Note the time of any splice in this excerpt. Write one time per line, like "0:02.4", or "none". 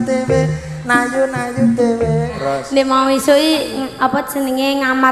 0:02.4